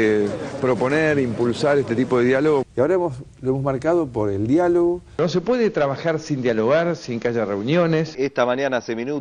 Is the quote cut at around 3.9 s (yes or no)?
no